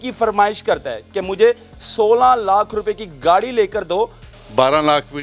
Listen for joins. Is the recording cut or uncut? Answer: cut